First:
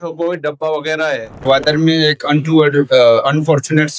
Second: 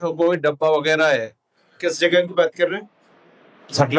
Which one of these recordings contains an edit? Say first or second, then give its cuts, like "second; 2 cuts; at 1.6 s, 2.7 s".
first; 1 cut; at 1.5 s